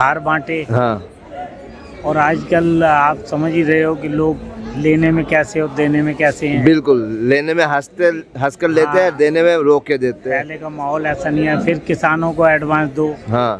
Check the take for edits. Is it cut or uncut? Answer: uncut